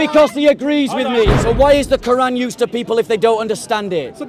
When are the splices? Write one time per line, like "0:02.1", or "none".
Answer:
0:01.3